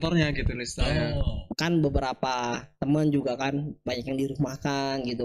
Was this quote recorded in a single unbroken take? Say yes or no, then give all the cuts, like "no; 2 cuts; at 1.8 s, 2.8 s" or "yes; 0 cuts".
no; 1 cut; at 1.4 s